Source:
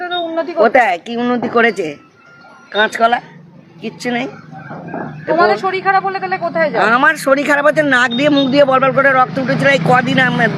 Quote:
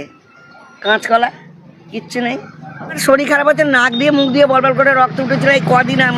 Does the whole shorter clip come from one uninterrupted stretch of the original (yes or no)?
no